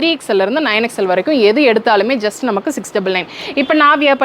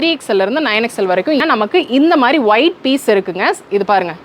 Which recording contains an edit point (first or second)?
second